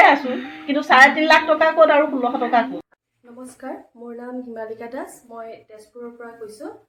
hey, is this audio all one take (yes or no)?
yes